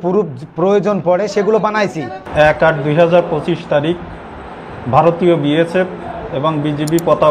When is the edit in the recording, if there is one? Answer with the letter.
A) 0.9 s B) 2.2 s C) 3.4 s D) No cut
B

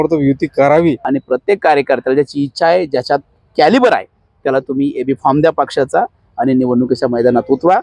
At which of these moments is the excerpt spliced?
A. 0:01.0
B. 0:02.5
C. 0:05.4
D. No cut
A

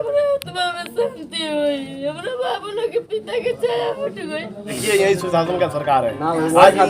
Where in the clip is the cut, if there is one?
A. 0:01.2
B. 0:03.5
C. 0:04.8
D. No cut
C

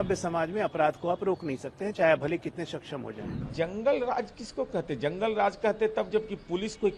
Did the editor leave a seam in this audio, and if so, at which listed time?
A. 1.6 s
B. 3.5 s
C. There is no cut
B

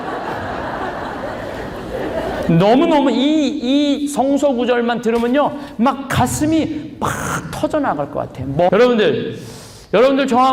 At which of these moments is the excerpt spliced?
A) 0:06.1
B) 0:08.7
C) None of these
B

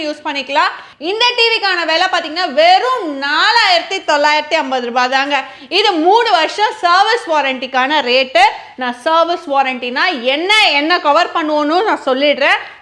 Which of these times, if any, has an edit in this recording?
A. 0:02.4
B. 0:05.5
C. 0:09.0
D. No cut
D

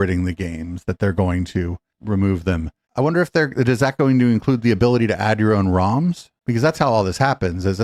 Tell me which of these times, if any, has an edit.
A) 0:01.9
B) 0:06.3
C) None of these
C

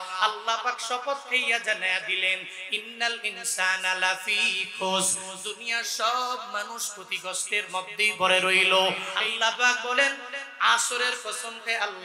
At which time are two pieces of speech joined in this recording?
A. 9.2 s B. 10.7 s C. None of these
A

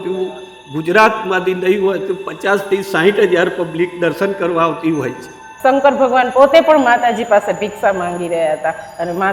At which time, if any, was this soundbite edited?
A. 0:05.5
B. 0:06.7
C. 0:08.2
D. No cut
A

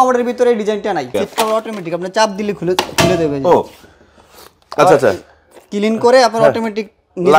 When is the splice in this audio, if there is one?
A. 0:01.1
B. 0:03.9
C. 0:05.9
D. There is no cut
A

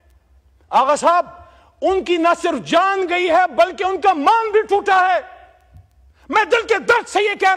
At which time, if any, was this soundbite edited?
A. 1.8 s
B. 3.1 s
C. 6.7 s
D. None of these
D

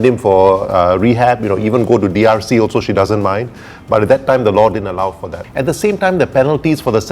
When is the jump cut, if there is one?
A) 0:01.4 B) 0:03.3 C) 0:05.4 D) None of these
C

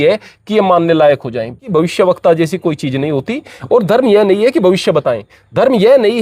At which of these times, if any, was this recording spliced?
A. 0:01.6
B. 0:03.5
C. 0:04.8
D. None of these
A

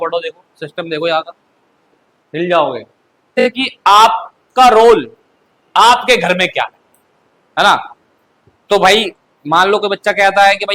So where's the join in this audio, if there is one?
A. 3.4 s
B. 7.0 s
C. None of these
A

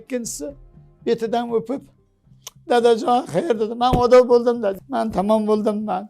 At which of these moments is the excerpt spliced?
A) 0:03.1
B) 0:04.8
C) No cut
B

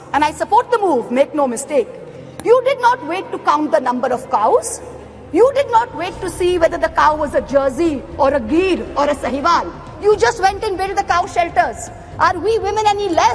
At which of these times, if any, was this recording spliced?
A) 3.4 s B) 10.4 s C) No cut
C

